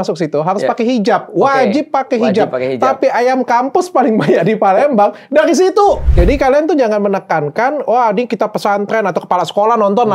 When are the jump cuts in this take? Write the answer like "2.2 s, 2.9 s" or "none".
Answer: 6.1 s